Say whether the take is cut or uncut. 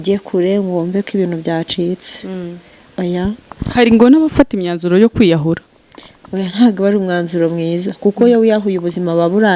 uncut